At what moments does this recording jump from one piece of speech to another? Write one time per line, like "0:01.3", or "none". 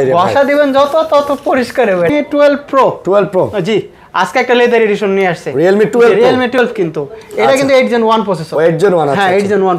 0:02.1
0:06.6